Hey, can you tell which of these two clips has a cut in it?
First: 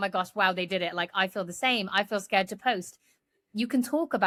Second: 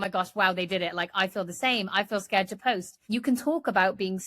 second; 1 cut; at 2.9 s

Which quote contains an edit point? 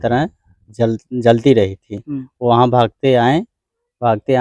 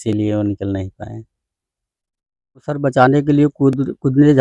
second; 1 cut; at 2.7 s

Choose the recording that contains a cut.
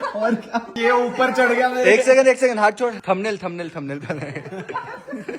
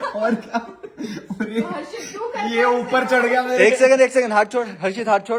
first; 2 cuts; at 0.8 s, 3.0 s

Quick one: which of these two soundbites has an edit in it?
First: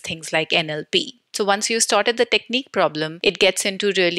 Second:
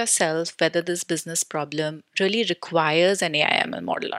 first; 2 cuts; at 1.3 s, 3.1 s

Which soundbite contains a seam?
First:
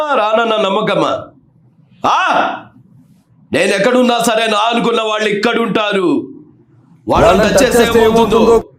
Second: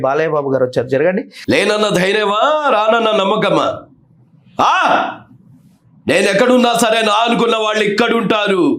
second; 1 cut; at 1.3 s

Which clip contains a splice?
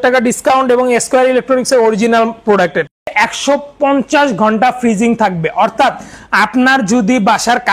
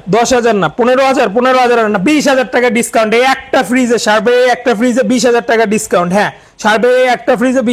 first; 1 cut; at 3.1 s

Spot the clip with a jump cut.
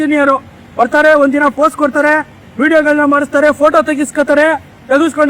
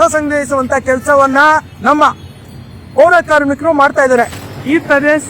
second; 1 cut; at 4.4 s

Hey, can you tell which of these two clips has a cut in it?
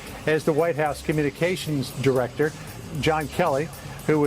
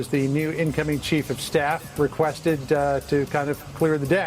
first; 1 cut; at 2.7 s

